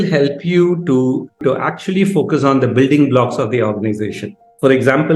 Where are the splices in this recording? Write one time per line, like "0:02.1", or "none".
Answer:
0:01.4